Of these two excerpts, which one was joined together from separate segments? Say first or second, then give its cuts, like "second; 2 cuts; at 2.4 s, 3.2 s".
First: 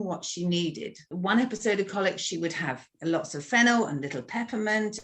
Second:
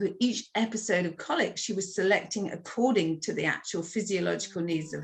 first; 2 cuts; at 1.1 s, 2.8 s